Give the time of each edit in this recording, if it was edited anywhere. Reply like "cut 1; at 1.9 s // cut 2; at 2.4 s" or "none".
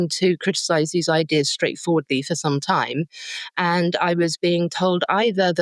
none